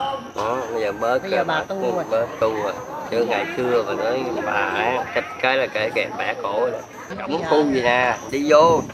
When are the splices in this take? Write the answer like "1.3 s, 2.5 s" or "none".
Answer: 7.2 s